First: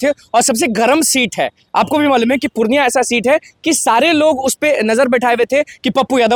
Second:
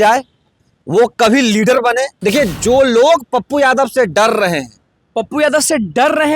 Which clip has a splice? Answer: second; 1 cut; at 2.1 s

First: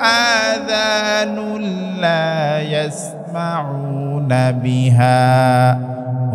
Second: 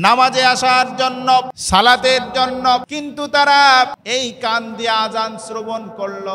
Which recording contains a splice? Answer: second; 3 cuts; at 1.6 s, 2.9 s, 4.0 s

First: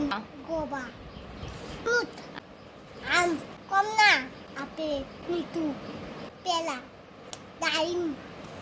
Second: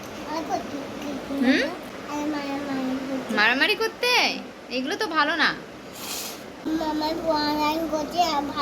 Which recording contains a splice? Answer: second; 1 cut; at 6.7 s

